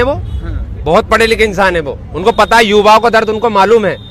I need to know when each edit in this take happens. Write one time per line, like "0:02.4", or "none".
none